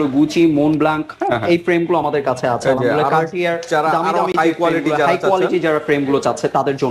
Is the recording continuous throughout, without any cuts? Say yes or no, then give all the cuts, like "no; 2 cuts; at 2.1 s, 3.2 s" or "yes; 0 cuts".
yes; 0 cuts